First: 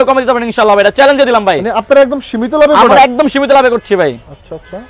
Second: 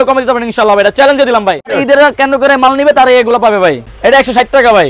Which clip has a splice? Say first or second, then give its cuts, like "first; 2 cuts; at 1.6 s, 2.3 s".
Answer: second; 2 cuts; at 1.8 s, 3.8 s